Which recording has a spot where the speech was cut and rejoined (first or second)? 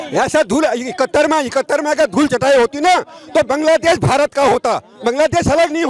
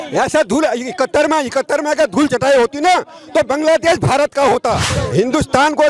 second